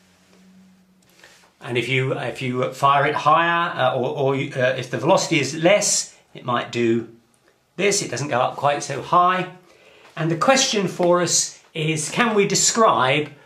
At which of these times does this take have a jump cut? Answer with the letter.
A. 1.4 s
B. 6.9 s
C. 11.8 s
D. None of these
D